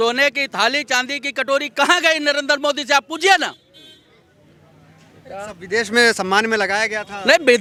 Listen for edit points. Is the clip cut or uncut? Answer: uncut